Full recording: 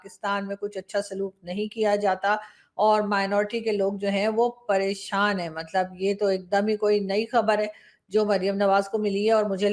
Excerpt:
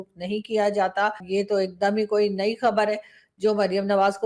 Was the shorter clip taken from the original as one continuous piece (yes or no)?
no